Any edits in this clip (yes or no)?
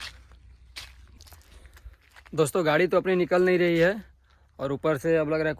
yes